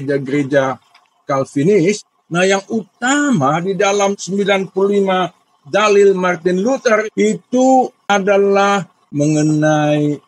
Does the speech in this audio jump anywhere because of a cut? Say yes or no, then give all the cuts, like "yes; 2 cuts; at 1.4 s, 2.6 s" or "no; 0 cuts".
yes; 5 cuts; at 2.1 s, 4.1 s, 7.0 s, 8.0 s, 9.0 s